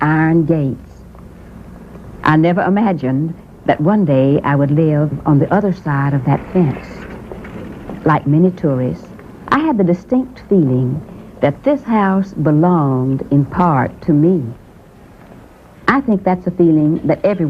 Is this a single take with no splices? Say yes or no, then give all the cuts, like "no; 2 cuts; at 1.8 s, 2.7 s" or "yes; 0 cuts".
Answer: no; 1 cut; at 9.7 s